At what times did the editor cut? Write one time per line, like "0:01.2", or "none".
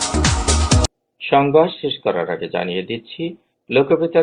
none